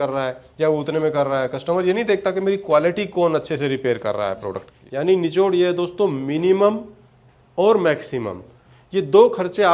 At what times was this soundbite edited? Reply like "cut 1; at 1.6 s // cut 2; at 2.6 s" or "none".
cut 1; at 4.8 s